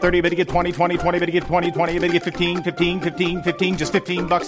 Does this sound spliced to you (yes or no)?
no